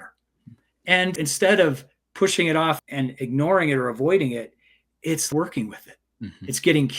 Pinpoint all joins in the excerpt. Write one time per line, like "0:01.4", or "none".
0:01.2
0:02.8
0:05.3